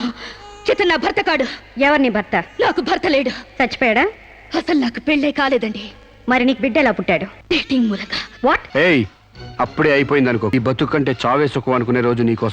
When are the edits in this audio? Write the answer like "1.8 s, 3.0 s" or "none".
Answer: 7.3 s, 8.6 s, 10.5 s